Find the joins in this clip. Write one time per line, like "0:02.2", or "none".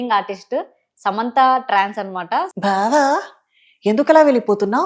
0:02.5